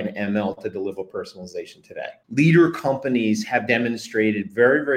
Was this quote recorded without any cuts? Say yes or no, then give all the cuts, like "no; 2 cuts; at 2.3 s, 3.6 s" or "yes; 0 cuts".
no; 1 cut; at 2.2 s